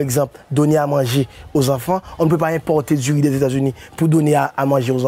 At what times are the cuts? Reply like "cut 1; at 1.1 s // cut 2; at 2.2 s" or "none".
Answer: cut 1; at 3.5 s